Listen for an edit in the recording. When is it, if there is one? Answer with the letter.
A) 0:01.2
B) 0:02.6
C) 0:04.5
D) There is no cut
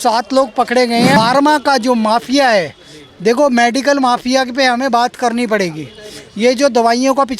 A